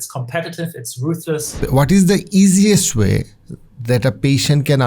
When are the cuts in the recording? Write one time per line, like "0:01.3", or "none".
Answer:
0:01.6